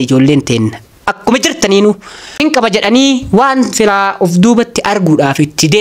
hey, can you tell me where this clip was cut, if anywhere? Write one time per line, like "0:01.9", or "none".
0:02.3